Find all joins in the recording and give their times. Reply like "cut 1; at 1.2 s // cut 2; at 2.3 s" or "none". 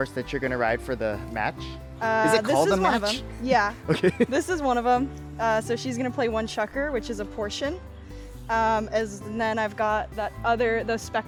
none